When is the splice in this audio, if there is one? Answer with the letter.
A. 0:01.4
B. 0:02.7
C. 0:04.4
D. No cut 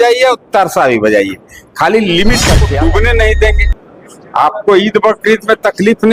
B